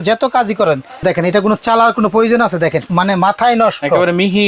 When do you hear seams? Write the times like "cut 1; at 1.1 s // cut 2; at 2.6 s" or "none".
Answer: cut 1; at 1.0 s // cut 2; at 2.8 s